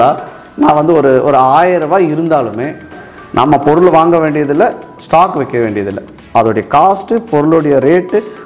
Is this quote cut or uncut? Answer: cut